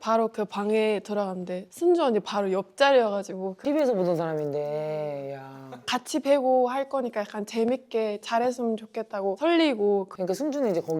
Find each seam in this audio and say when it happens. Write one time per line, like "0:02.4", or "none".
0:03.5
0:10.1